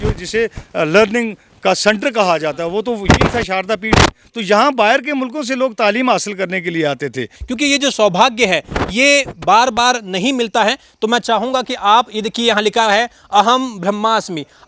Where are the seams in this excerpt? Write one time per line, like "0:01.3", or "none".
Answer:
0:07.4